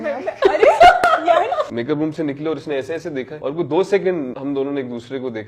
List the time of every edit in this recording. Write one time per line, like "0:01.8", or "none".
0:01.7
0:03.3
0:04.3